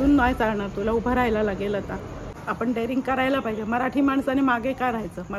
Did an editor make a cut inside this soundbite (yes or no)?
yes